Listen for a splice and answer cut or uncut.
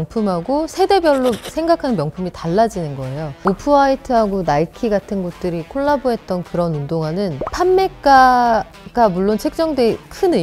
cut